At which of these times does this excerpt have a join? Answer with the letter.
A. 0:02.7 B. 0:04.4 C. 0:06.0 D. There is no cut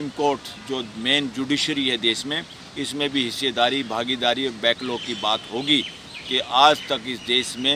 D